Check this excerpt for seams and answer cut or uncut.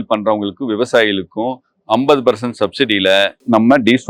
uncut